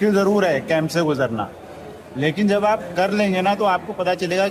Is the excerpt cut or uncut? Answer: uncut